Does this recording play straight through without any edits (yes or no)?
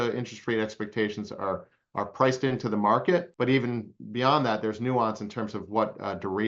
yes